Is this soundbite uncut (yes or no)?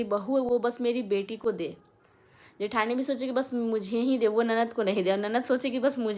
yes